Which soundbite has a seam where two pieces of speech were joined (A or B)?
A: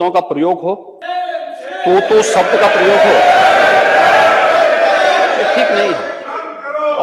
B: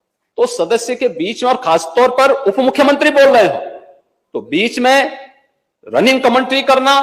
A